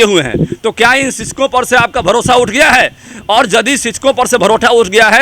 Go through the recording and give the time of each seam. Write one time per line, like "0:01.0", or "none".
none